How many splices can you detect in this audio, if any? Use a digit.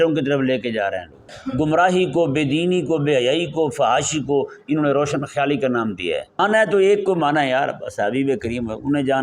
2